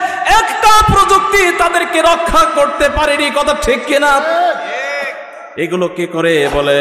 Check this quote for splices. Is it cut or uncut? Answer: uncut